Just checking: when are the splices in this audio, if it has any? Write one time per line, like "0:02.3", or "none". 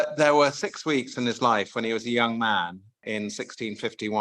0:03.0